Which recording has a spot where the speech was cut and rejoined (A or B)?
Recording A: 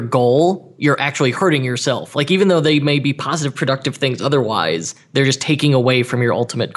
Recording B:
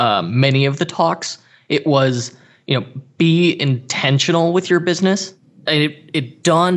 B